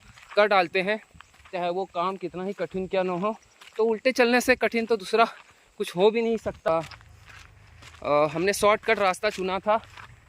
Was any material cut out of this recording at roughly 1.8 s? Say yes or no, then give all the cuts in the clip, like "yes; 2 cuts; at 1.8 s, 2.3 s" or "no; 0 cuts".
no; 1 cut; at 6.7 s